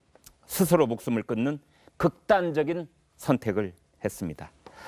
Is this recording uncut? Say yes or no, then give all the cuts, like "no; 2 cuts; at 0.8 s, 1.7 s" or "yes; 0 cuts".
yes; 0 cuts